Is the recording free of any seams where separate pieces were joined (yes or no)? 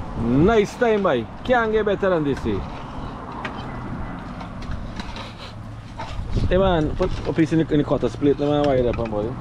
yes